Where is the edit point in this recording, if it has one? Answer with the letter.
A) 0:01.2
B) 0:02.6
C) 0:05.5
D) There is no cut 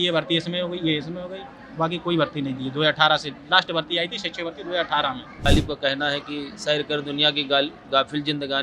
C